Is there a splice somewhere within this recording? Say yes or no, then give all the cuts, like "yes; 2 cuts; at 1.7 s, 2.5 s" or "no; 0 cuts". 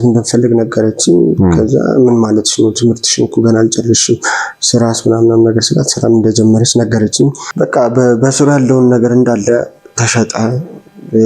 yes; 1 cut; at 7.4 s